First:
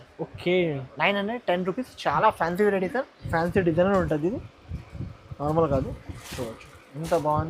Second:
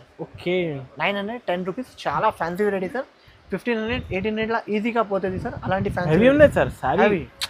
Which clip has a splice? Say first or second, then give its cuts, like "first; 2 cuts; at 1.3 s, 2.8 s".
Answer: first; 1 cut; at 3.2 s